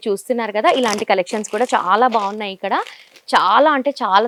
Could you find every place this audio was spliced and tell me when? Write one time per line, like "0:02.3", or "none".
none